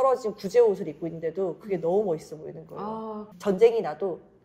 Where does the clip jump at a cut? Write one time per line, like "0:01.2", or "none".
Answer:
0:03.3